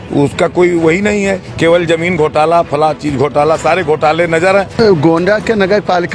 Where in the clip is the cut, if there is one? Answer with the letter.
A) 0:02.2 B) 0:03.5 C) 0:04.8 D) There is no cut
C